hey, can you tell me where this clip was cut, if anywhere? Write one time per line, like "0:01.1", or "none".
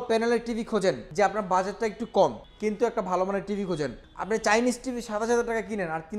0:01.0
0:02.5
0:04.1